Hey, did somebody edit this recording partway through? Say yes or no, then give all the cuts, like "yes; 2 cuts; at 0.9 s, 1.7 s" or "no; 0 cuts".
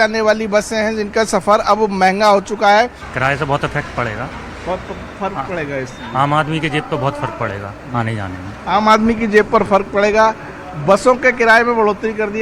yes; 1 cut; at 4.5 s